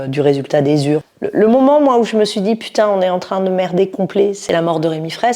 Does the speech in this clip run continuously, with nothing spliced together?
no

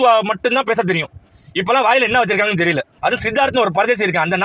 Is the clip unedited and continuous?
no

